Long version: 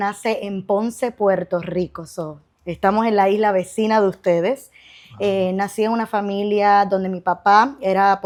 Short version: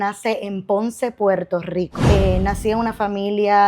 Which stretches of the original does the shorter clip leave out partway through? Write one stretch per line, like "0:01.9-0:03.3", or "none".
0:02.0-0:05.1